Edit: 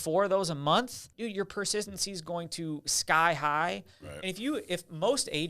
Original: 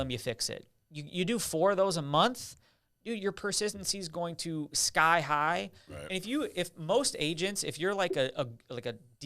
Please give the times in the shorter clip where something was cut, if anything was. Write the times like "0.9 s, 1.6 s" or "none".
1.0 s